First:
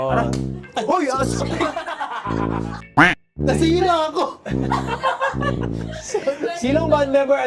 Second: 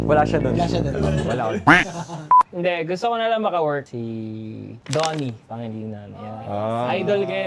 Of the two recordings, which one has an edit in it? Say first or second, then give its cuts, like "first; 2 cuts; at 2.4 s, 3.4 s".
second; 1 cut; at 2.4 s